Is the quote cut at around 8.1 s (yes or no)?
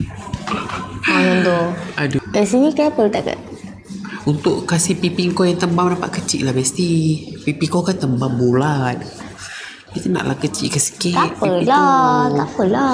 no